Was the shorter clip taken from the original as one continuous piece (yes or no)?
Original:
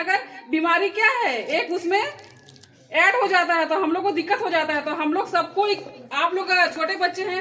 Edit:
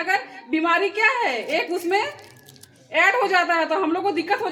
yes